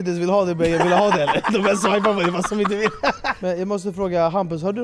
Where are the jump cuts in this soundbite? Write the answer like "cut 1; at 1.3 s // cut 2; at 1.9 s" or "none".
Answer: cut 1; at 3.4 s

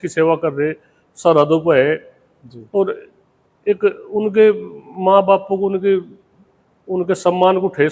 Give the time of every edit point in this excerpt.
none

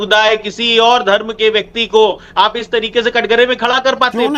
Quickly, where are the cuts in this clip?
none

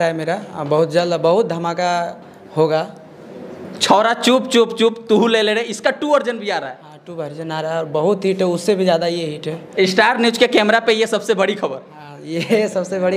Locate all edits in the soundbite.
none

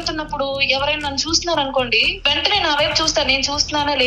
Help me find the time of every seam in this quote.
cut 1; at 2.1 s

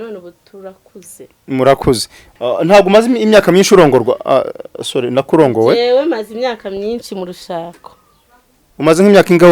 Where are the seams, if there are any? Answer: cut 1; at 2.2 s

